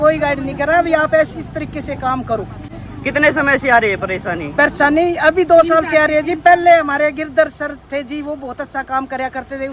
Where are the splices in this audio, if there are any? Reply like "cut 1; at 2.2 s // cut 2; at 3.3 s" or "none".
none